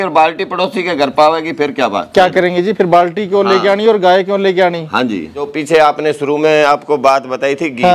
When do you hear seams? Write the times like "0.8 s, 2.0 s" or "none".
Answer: 5.5 s